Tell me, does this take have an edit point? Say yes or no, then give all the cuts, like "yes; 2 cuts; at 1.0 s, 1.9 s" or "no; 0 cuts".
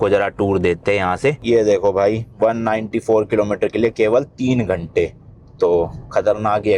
yes; 1 cut; at 1.4 s